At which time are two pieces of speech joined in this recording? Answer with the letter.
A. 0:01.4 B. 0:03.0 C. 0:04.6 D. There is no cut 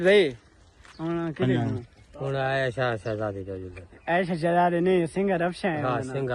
D